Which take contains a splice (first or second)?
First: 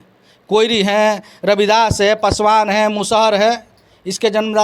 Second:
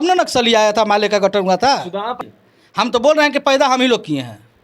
second